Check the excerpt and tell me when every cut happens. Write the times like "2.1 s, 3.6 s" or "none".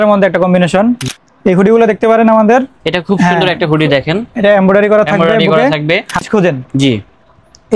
1.1 s, 6.3 s